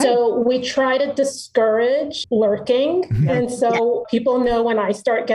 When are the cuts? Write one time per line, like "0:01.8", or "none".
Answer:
0:02.2
0:04.0